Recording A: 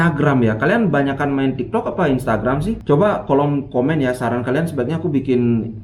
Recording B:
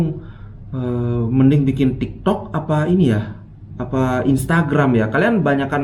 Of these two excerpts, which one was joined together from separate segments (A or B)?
A